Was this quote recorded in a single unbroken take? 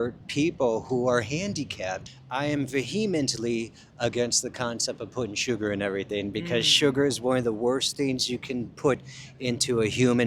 no; 1 cut; at 2.0 s

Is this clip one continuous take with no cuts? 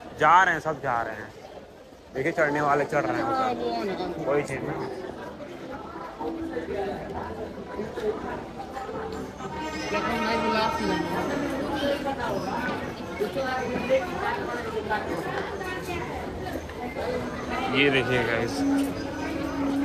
yes; 0 cuts

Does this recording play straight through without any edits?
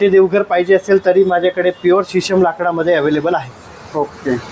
yes; 0 cuts

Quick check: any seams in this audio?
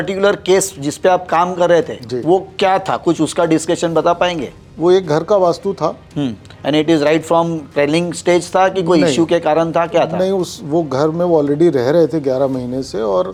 no; 0 cuts

